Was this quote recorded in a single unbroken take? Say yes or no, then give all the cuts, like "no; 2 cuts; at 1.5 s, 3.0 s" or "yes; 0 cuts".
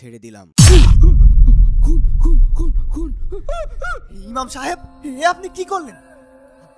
yes; 0 cuts